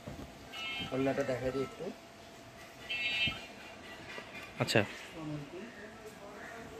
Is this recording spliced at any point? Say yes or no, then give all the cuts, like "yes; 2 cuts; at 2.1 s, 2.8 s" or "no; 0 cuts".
no; 0 cuts